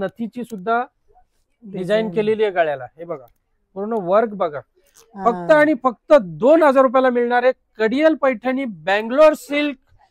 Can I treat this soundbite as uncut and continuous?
yes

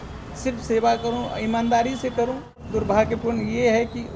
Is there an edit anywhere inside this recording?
yes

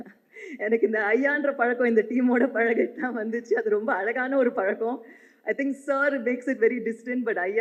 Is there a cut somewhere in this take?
no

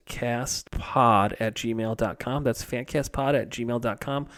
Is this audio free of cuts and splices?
yes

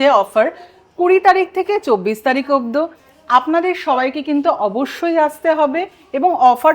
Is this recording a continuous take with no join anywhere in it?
yes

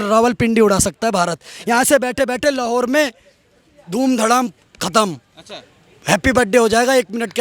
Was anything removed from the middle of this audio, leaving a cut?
no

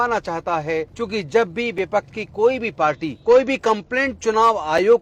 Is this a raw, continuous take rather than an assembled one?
no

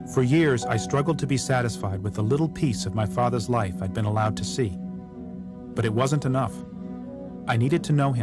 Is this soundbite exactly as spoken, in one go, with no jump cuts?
no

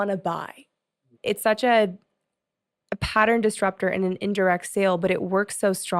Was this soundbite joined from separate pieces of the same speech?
yes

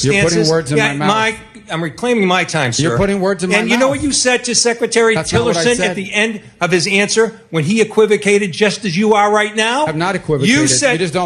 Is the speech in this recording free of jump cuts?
yes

